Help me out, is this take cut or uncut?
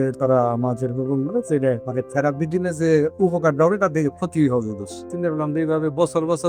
cut